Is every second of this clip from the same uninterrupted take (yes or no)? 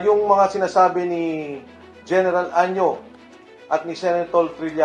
yes